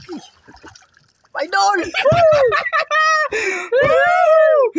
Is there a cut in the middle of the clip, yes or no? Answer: no